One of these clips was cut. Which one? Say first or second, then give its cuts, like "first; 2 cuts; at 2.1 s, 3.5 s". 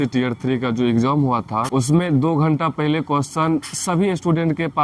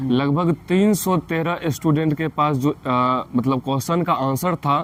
first; 1 cut; at 1.7 s